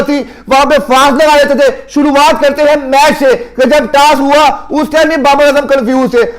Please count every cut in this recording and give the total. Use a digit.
0